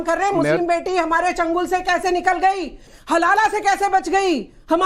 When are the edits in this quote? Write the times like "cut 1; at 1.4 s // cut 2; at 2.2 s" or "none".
cut 1; at 2.9 s